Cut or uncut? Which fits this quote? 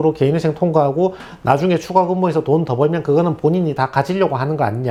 uncut